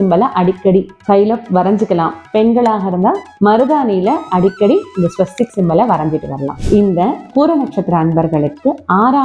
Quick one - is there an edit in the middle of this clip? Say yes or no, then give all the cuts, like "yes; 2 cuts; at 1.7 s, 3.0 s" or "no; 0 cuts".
no; 0 cuts